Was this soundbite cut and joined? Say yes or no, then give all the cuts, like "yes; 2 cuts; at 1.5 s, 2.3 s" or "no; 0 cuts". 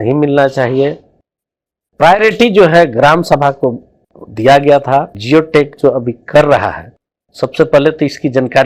yes; 1 cut; at 5.1 s